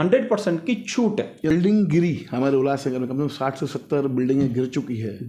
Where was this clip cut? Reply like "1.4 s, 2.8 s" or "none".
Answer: 1.5 s